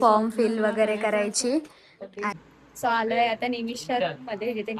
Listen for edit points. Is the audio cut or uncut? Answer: cut